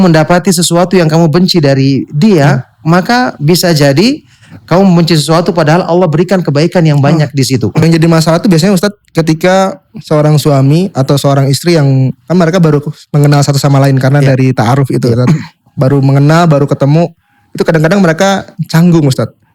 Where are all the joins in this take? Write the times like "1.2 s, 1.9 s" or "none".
7.8 s